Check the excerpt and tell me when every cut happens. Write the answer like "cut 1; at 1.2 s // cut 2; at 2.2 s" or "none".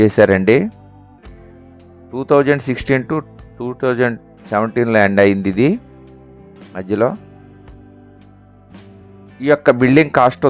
cut 1; at 7.2 s // cut 2; at 9.3 s